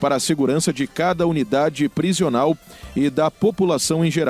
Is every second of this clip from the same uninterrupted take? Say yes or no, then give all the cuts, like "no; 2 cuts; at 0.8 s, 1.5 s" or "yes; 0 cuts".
yes; 0 cuts